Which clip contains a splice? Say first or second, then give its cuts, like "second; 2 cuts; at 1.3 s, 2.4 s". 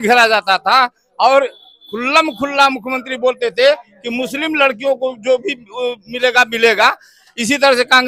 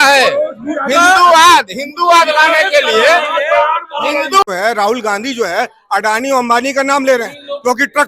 second; 1 cut; at 4.4 s